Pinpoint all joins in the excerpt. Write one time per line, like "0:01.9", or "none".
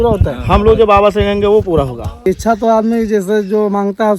0:02.3